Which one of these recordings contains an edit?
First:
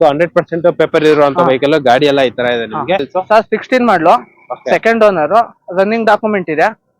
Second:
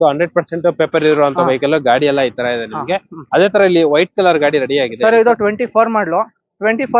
first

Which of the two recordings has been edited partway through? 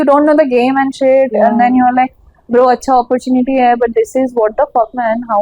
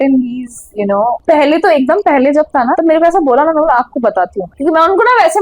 second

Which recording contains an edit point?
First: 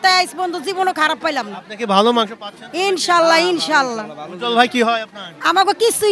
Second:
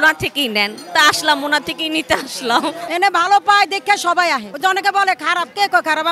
second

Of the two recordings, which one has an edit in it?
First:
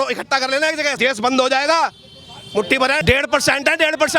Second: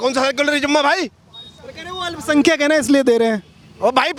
first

